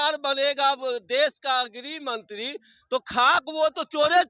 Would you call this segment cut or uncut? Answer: uncut